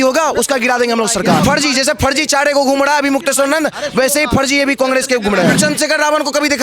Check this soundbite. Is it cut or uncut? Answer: cut